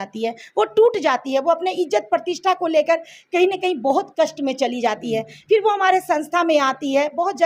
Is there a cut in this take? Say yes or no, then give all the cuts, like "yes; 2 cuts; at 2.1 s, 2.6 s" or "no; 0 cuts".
no; 0 cuts